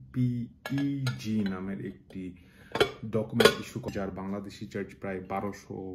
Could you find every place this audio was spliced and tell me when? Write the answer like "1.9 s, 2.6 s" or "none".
3.9 s